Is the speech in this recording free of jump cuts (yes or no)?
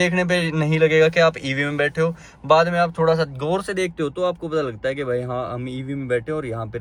yes